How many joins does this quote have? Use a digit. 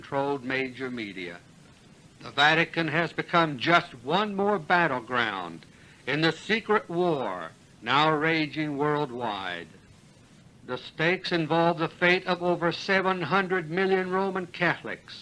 1